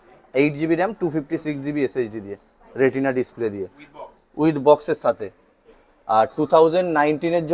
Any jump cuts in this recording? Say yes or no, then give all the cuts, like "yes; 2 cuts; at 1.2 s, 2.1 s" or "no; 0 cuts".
no; 0 cuts